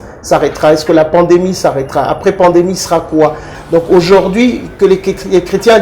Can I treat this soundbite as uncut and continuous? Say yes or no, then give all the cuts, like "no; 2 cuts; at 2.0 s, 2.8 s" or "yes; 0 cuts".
no; 1 cut; at 3.5 s